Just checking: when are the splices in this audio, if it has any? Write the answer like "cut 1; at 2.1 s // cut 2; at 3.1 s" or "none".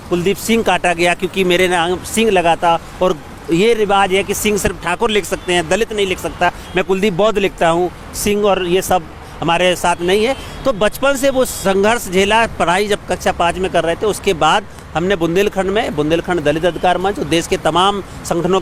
none